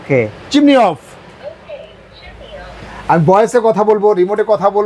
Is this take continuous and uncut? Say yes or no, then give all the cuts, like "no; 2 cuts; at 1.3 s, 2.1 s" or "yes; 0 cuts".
yes; 0 cuts